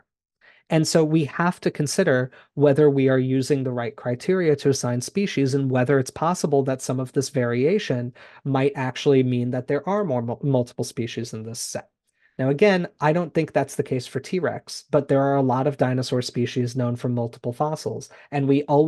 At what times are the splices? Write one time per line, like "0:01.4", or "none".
none